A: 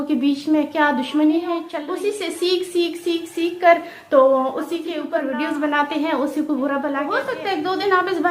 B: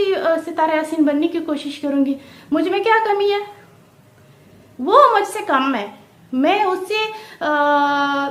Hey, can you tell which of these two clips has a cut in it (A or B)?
A